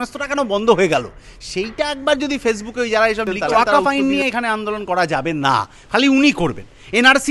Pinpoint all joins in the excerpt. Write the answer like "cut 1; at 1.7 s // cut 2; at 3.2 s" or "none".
cut 1; at 3.5 s